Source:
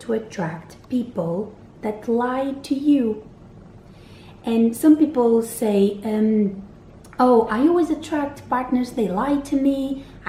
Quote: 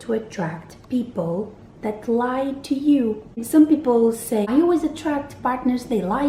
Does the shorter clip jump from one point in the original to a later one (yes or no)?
yes